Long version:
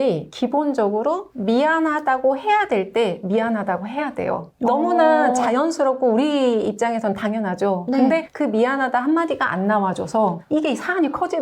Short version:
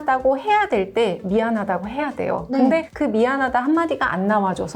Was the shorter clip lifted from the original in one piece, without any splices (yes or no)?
no